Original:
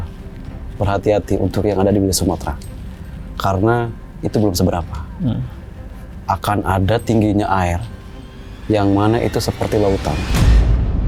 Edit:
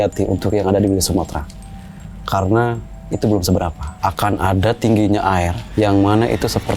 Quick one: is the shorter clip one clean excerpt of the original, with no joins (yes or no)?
no